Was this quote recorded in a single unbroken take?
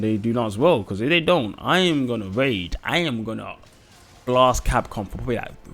yes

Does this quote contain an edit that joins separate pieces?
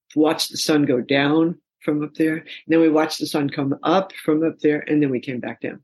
no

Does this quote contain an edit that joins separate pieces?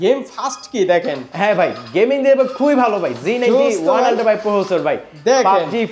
no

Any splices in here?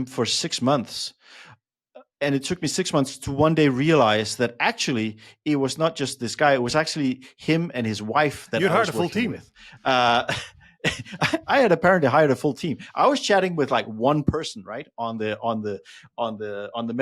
no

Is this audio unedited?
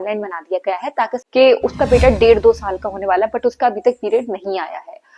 no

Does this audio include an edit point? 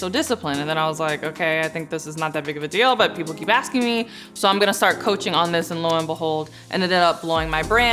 no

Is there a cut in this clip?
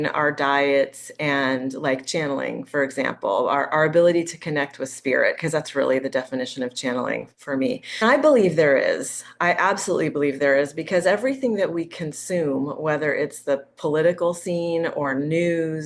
yes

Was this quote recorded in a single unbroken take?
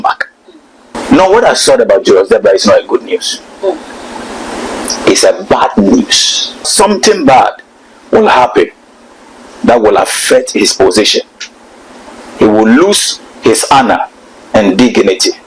no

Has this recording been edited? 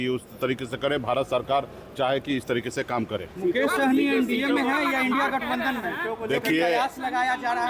no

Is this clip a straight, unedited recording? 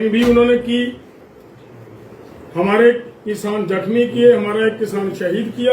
yes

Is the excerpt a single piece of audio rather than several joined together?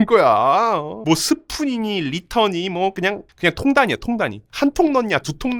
no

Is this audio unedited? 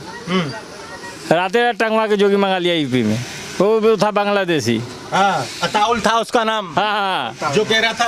yes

